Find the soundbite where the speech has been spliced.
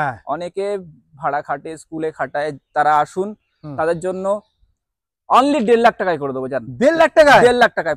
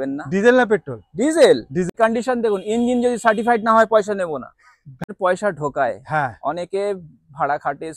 second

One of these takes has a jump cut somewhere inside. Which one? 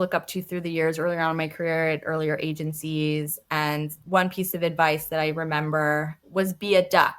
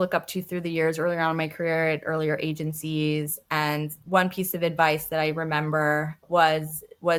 first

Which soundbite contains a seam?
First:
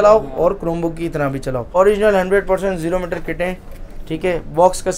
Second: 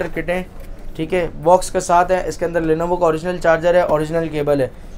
first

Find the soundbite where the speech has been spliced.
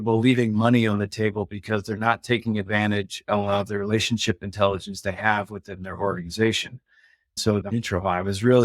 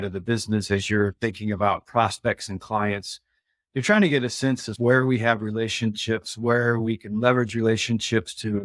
first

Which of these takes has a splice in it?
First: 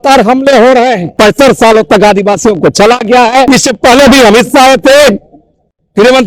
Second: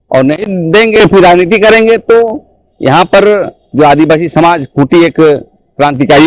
first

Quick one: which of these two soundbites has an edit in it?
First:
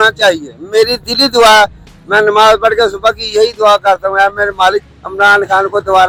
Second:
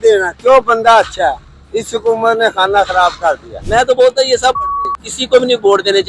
second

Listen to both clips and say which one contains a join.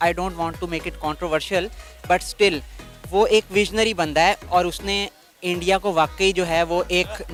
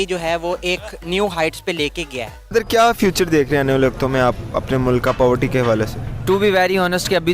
second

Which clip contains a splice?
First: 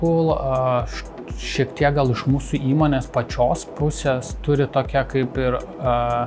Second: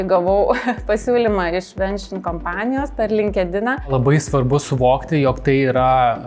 second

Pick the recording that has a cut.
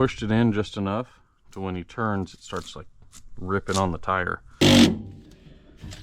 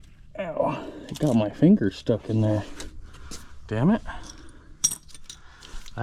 first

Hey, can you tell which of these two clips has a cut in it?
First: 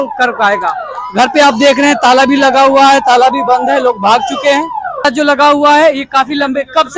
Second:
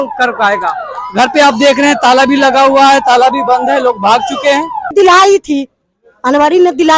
second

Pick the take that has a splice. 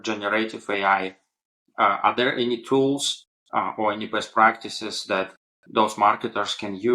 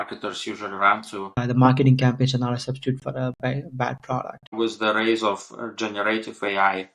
second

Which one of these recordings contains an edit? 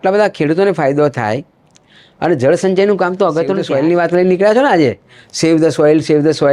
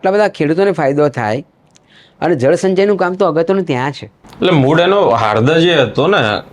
first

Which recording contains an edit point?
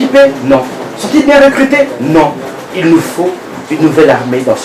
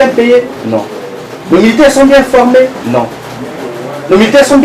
first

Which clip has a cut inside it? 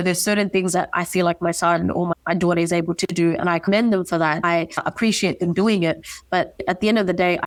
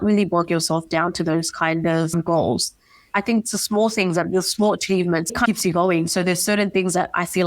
second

